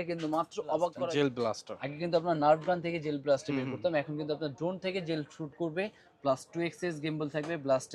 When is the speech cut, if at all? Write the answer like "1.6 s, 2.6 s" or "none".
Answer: 1.0 s